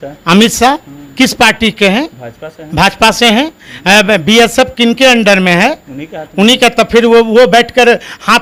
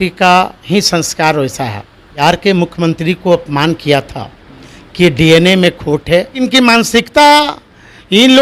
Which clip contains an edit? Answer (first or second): second